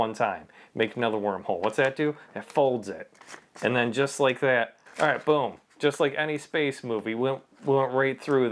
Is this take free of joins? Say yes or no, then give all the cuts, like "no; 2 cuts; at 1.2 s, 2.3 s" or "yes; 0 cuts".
no; 1 cut; at 4.8 s